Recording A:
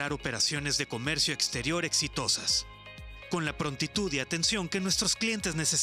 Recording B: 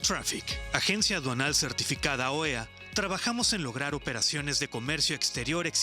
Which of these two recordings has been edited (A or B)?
B